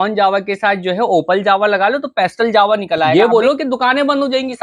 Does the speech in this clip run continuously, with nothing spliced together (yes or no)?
no